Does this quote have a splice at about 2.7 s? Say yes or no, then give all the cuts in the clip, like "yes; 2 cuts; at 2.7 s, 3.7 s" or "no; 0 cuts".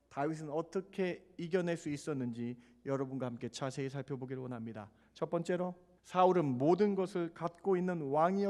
no; 2 cuts; at 5.0 s, 5.9 s